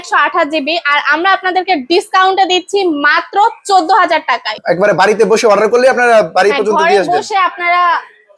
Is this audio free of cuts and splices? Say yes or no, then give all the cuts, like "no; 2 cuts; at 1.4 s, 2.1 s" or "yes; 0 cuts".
no; 1 cut; at 4.5 s